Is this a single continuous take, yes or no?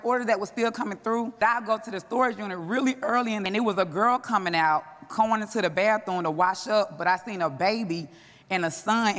no